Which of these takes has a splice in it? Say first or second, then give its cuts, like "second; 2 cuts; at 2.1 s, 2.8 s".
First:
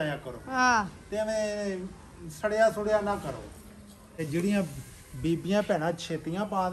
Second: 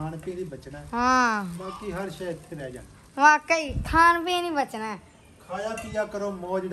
first; 1 cut; at 4.0 s